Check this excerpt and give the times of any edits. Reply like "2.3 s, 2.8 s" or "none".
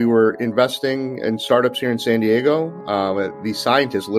none